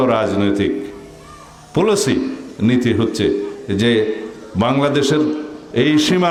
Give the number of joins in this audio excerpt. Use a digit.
0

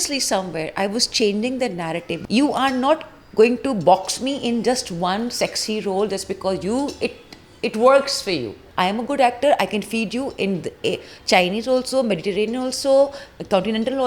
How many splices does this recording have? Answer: 2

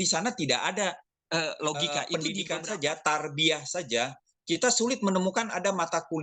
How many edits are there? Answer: 1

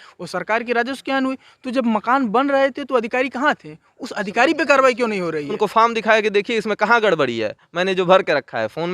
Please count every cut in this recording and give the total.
1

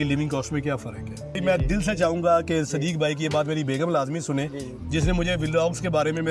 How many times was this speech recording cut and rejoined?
1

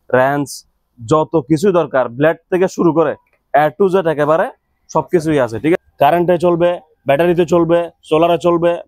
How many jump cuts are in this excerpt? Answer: 1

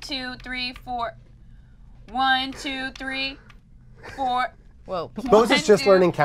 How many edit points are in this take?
1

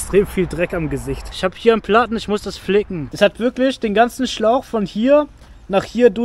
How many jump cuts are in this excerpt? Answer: 2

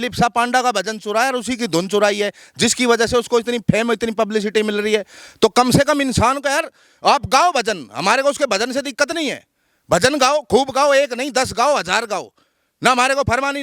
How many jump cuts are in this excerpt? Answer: 0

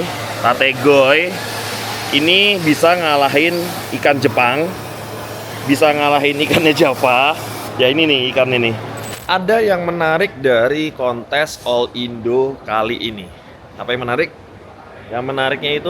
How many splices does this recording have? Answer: 1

